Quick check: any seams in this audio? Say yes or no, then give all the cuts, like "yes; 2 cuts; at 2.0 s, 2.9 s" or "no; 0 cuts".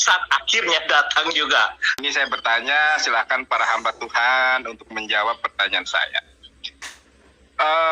yes; 1 cut; at 1.9 s